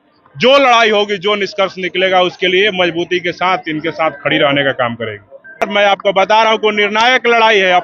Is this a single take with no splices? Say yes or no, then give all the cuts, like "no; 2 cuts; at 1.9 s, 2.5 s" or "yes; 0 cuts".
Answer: no; 1 cut; at 5.6 s